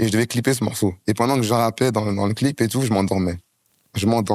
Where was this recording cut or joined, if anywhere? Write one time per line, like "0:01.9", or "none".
0:01.0